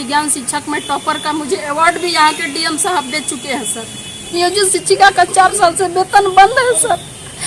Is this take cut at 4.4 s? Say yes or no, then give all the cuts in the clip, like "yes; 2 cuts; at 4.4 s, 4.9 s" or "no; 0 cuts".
yes; 1 cut; at 4.4 s